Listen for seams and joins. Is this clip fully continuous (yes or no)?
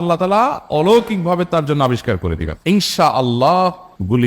no